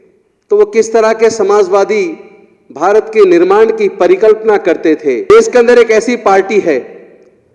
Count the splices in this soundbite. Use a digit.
1